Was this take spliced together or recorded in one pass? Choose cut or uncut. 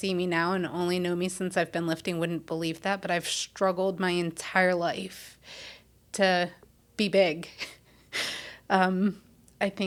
uncut